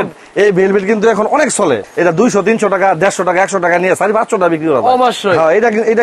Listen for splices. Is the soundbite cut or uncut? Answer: cut